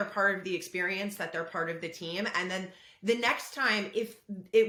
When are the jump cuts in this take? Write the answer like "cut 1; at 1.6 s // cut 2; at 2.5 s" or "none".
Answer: none